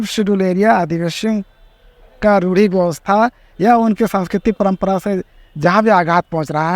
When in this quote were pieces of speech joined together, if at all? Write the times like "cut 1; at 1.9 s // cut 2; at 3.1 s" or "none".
none